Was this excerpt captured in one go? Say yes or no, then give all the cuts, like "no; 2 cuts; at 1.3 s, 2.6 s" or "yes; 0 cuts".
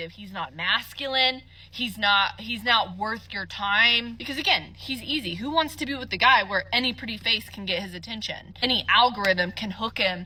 yes; 0 cuts